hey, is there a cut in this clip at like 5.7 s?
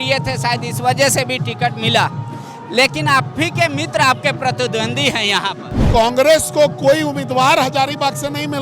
yes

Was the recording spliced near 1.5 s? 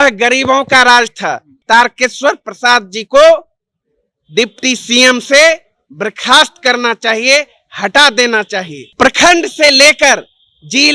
yes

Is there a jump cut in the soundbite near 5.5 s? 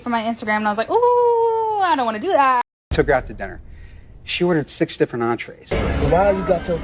yes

